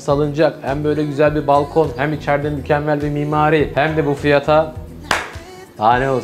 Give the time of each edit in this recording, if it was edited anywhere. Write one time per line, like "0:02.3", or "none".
0:03.7